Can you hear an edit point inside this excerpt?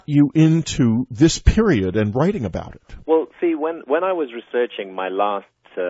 yes; 1 cut; at 2.2 s

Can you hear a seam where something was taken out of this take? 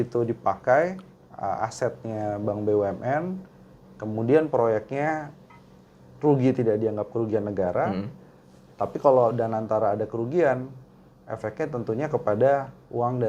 no; 0 cuts

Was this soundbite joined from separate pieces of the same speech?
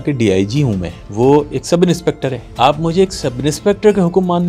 yes; 2 cuts; at 1.0 s, 2.4 s

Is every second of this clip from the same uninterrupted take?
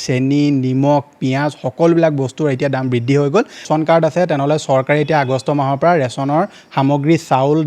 no; 1 cut; at 3.6 s

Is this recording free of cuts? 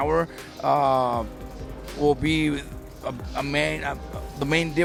yes; 0 cuts

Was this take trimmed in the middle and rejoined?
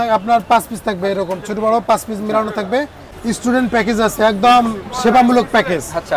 yes; 1 cut; at 3.0 s

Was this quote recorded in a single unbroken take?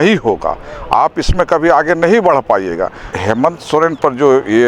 no; 1 cut; at 3.1 s

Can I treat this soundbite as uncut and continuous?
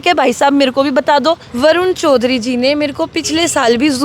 no; 1 cut; at 1.5 s

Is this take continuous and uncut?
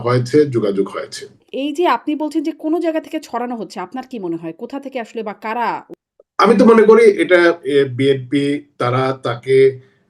no; 2 cuts; at 1.4 s, 6.0 s

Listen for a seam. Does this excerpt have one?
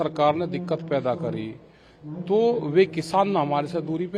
no; 0 cuts

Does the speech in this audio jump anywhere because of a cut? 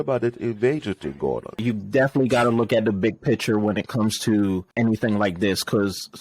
yes; 2 cuts; at 1.6 s, 4.7 s

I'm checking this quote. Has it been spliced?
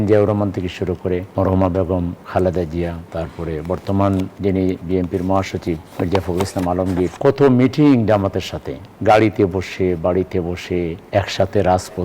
yes; 7 cuts; at 1.3 s, 2.2 s, 3.0 s, 4.3 s, 5.9 s, 7.1 s, 11.0 s

